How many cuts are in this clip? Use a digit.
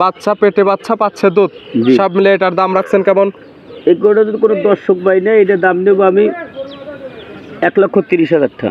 0